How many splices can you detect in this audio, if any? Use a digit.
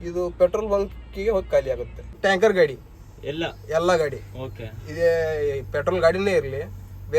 1